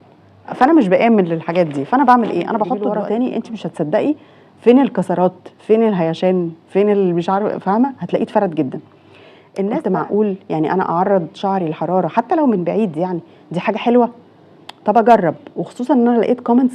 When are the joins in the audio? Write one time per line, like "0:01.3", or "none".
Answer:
0:02.8
0:09.7